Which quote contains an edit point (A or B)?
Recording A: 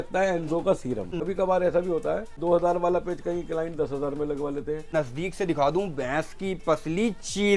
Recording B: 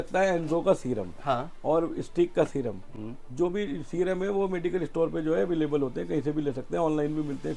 A